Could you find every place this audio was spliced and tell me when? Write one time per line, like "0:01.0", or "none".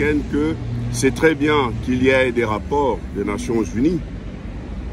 none